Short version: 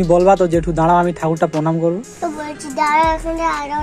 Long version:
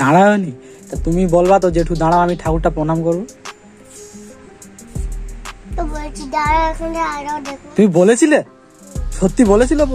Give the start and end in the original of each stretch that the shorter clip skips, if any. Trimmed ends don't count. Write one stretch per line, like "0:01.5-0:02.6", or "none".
0:03.3-0:05.6